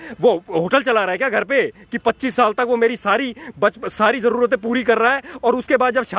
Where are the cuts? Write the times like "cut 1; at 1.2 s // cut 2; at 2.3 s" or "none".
none